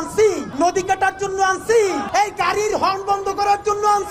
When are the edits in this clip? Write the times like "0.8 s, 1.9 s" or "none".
2.1 s